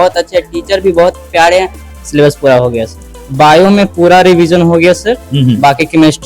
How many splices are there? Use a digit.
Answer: 2